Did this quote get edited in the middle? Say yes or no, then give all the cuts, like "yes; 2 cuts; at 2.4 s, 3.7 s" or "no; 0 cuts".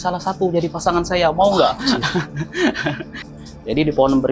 yes; 1 cut; at 3.2 s